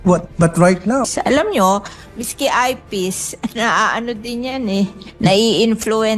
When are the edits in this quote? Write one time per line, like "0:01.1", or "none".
0:01.1